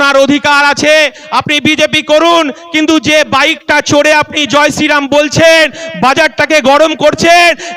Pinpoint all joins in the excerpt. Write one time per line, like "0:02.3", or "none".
none

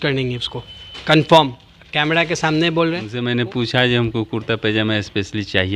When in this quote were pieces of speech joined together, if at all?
0:03.2

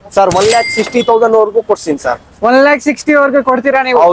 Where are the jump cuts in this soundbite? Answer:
none

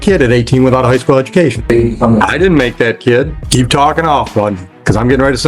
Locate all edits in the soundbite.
0:01.6
0:03.4

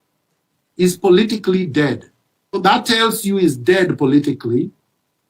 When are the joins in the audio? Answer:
0:02.6

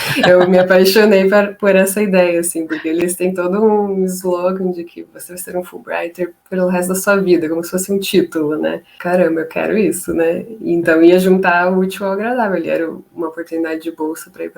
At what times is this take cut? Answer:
0:03.0
0:08.9

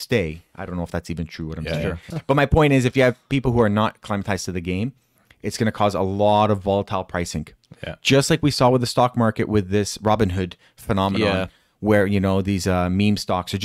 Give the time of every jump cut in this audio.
0:02.1

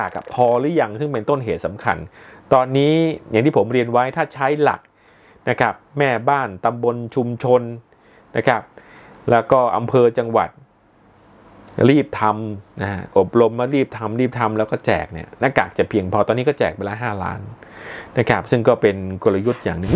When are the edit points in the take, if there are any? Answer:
none

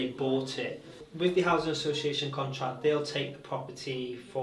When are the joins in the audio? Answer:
0:01.0

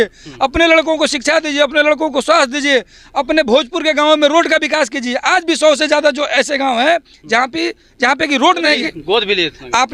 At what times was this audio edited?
0:08.6

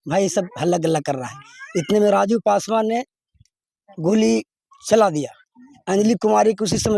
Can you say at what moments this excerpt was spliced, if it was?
none

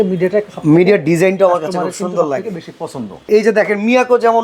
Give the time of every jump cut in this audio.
0:03.3

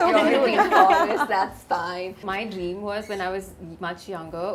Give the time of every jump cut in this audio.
none

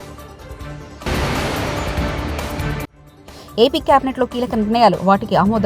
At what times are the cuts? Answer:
0:01.0
0:03.0

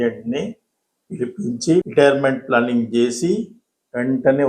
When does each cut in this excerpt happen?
0:01.8

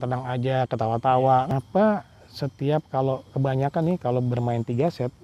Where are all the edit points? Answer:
0:01.5

